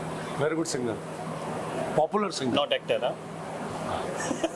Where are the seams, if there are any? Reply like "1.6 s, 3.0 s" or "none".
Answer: none

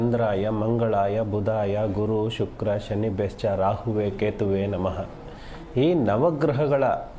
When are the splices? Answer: 1.3 s, 4.4 s, 6.1 s

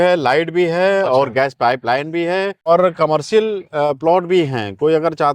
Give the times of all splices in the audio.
2.7 s

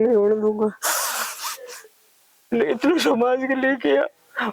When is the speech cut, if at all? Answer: none

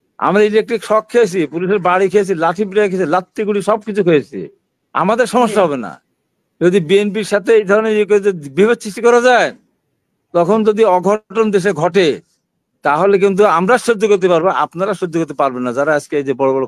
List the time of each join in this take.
none

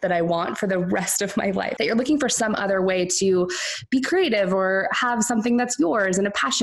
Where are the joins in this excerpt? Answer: 1.7 s

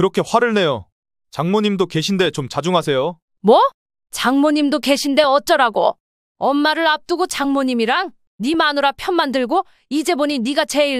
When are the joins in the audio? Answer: 3.3 s

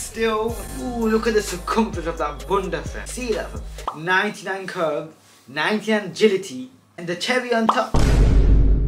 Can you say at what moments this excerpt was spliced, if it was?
7.9 s

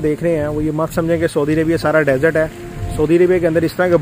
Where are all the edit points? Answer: none

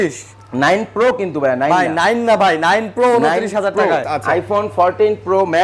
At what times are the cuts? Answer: 4.1 s

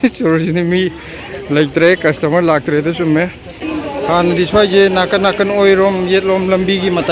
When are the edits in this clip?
3.5 s

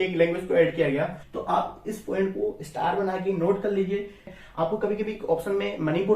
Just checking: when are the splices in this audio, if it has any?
1.3 s, 4.3 s

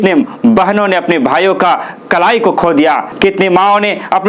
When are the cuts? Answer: 3.1 s

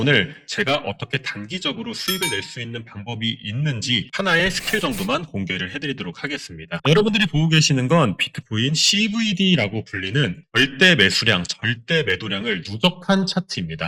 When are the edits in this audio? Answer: none

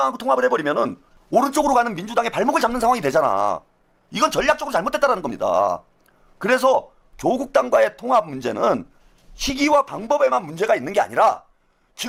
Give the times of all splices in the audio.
none

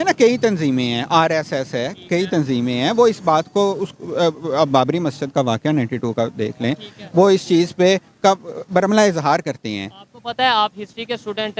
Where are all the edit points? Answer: none

